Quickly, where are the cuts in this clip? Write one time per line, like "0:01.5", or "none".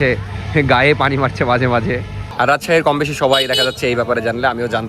0:02.2